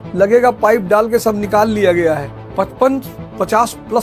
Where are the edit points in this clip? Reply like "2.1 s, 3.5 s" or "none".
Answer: none